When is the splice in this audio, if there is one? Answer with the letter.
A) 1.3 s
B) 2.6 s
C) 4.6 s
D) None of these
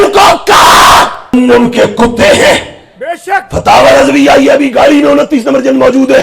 A